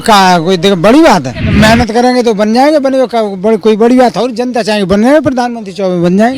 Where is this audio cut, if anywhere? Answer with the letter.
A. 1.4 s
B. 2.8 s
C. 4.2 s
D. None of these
A